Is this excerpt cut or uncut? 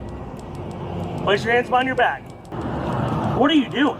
cut